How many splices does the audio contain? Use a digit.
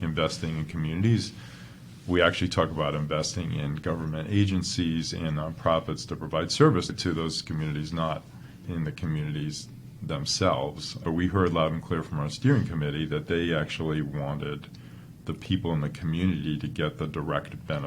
2